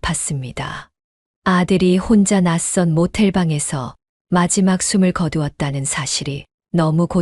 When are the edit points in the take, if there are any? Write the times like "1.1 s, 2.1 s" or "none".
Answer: none